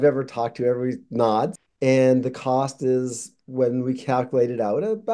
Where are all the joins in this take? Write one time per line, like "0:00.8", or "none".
0:01.6